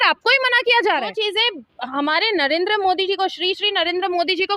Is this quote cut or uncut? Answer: cut